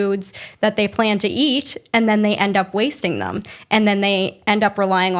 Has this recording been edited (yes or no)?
no